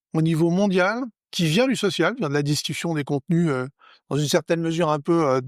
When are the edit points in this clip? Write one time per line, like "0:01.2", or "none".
0:01.2

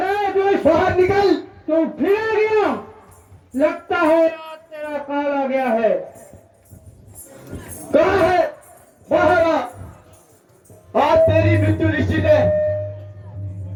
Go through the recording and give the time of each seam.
none

